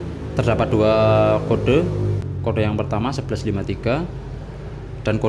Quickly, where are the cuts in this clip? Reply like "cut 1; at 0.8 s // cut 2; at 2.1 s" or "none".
cut 1; at 2.2 s